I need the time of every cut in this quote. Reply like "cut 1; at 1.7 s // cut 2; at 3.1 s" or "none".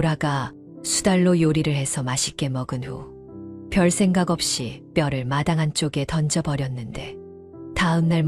none